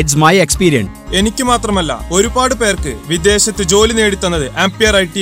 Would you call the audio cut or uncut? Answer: cut